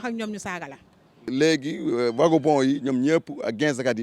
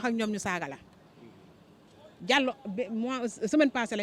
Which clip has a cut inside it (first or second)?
first